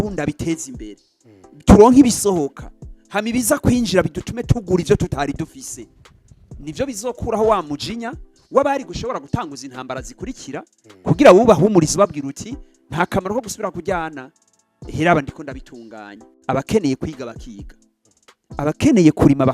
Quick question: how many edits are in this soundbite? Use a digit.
1